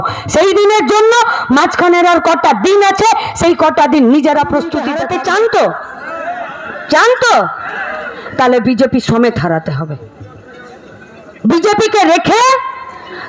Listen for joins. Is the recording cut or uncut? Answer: cut